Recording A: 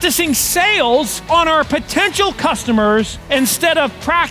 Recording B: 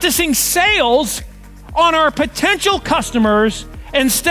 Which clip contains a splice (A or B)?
A